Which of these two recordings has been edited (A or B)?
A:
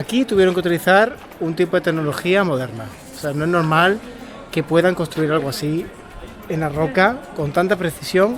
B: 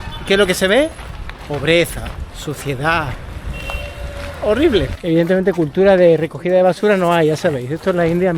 B